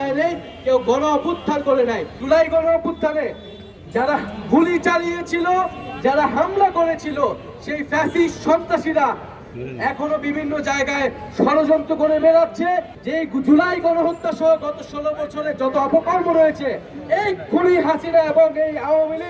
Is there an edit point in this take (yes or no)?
yes